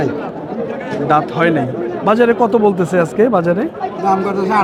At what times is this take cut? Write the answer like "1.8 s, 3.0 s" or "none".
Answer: none